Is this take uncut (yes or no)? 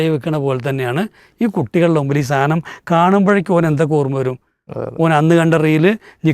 yes